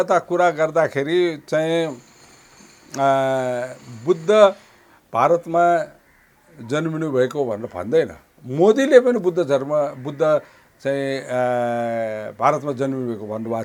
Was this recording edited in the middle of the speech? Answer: no; 0 cuts

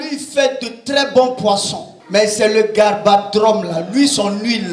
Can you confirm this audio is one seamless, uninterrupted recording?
yes; 0 cuts

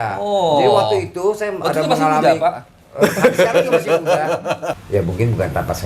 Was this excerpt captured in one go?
no; 1 cut; at 4.8 s

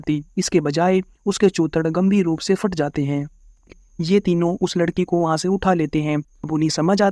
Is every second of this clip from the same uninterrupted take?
no; 2 cuts; at 3.7 s, 6.3 s

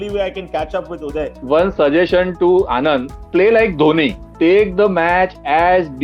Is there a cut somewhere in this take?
yes; 3 cuts; at 1.4 s, 3.2 s, 4.2 s

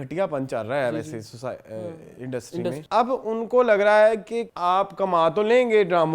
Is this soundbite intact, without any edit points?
no; 2 cuts; at 2.8 s, 4.4 s

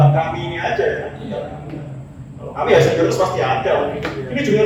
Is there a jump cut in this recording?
no; 0 cuts

